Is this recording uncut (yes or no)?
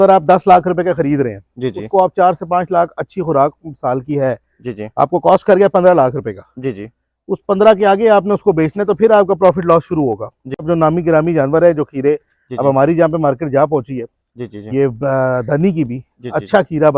no